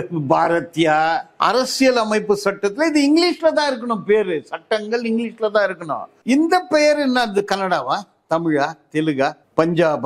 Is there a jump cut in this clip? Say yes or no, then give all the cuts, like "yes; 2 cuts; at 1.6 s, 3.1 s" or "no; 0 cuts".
yes; 2 cuts; at 1.3 s, 6.1 s